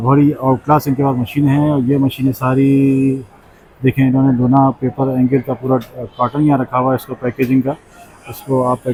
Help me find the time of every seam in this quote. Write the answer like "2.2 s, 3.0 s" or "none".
none